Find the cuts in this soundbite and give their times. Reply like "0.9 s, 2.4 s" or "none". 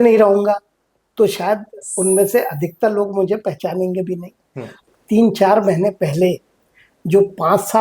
4.9 s

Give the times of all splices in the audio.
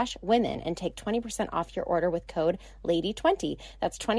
none

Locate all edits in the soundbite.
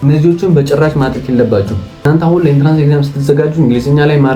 2.0 s

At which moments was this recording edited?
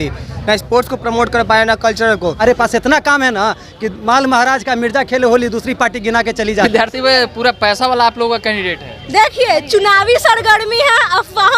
2.4 s, 6.7 s

